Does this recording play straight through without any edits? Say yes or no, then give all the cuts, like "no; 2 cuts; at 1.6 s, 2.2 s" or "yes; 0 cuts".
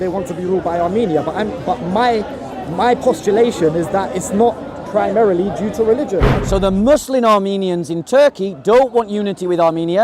no; 1 cut; at 6.3 s